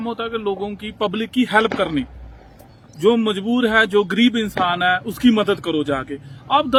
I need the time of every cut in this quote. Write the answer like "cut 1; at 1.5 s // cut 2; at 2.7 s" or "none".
none